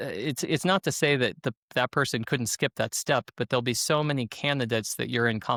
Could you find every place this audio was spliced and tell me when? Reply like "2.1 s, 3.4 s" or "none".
none